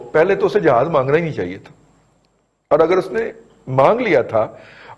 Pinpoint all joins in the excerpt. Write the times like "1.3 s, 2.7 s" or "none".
none

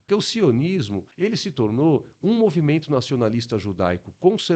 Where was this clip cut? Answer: 1.0 s

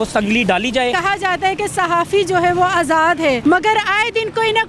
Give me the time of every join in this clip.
1.0 s, 3.4 s

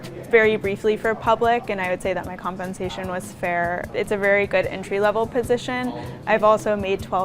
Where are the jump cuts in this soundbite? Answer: 3.9 s, 6.1 s

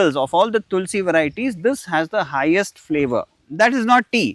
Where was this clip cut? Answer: 3.4 s

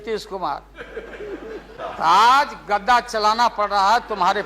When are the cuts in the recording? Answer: 1.7 s

